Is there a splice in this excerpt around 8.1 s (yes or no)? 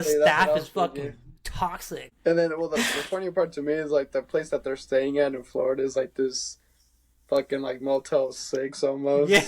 no